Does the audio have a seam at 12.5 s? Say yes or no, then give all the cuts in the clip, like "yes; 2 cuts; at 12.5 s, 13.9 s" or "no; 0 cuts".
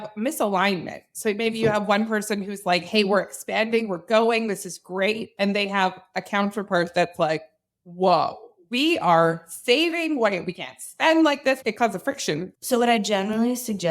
yes; 2 cuts; at 11.6 s, 12.5 s